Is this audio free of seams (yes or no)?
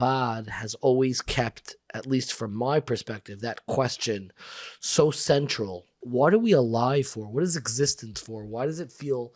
no